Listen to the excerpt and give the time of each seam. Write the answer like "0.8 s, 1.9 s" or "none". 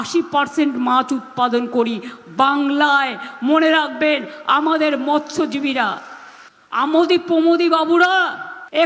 none